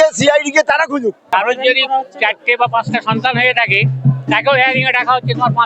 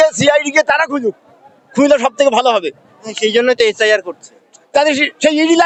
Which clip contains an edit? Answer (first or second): first